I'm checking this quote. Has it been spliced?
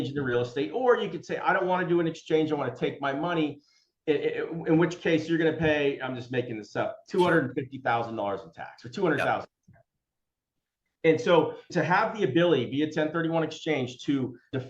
no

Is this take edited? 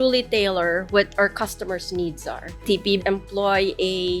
no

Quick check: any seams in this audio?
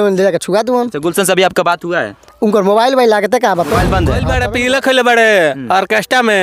yes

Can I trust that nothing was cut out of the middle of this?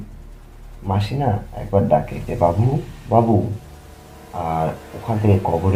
yes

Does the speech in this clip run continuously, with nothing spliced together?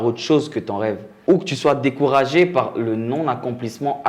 no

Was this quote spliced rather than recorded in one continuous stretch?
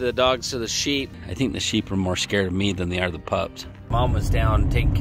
yes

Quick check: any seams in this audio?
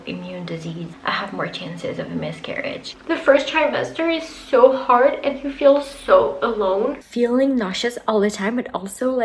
yes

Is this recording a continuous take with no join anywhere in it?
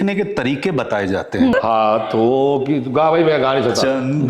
no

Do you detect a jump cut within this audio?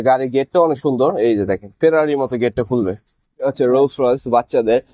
yes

